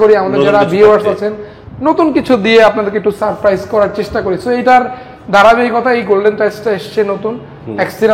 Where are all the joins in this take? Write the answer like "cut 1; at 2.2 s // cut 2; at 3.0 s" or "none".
none